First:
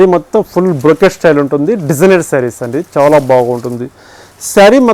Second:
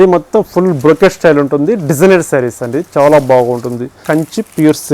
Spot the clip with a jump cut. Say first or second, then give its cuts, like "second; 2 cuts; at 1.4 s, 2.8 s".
second; 1 cut; at 4.0 s